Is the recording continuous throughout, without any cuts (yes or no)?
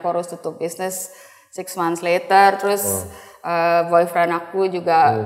yes